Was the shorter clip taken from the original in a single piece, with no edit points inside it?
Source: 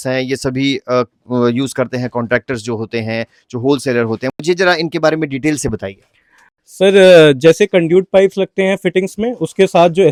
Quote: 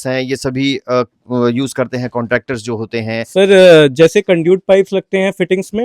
no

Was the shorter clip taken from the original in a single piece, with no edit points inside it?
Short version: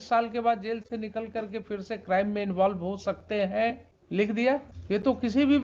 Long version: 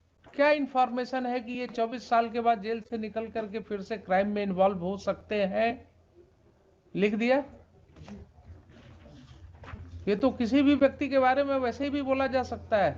no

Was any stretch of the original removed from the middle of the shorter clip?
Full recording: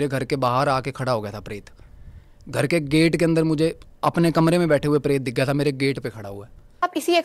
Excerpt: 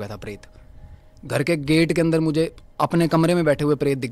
no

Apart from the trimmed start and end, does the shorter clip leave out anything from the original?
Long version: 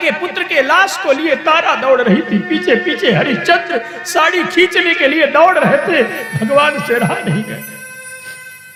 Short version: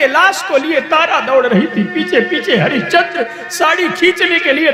no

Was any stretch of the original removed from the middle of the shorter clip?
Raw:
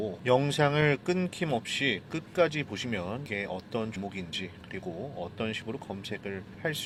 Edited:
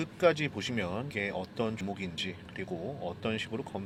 no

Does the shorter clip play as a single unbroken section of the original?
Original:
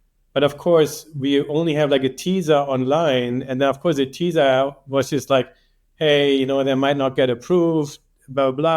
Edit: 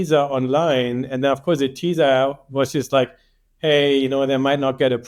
yes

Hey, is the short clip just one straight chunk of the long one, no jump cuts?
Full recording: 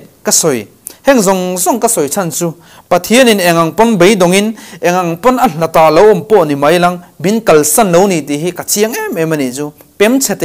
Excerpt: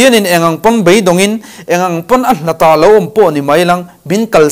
yes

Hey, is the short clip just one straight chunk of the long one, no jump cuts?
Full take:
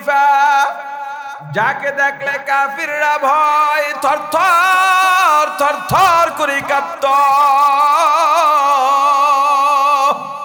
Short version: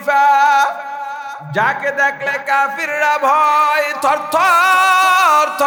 yes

